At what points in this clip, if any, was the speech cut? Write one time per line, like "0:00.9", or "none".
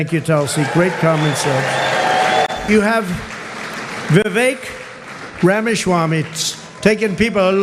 0:02.6

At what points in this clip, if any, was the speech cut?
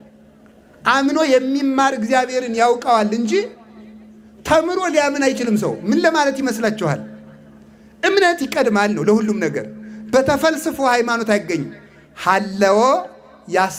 none

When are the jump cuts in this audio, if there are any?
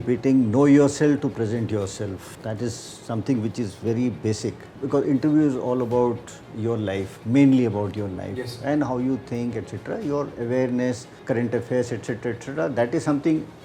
0:02.3
0:04.7
0:11.1

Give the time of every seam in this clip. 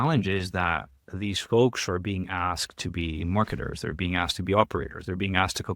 none

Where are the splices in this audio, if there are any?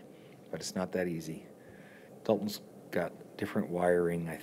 0:02.0

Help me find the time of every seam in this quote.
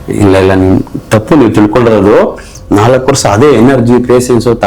0:02.5

